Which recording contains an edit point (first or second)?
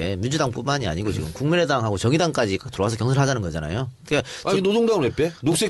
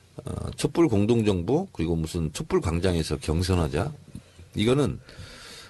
second